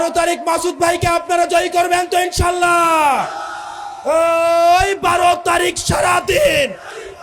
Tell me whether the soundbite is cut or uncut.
uncut